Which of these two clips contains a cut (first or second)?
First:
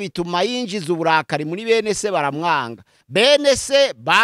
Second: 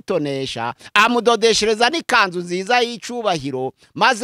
first